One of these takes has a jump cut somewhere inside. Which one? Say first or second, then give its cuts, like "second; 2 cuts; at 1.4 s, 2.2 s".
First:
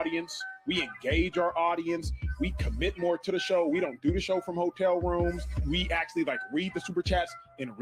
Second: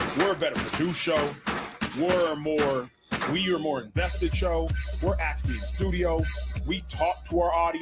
second; 1 cut; at 6.4 s